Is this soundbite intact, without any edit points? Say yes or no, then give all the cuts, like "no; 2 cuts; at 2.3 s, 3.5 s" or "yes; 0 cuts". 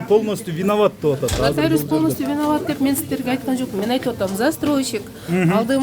yes; 0 cuts